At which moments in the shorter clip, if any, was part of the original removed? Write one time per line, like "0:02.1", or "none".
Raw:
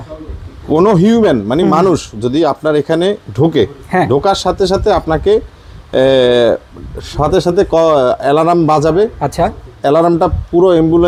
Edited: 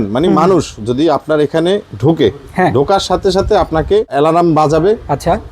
0:04.1